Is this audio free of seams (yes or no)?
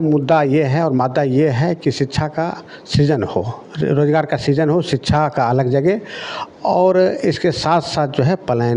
yes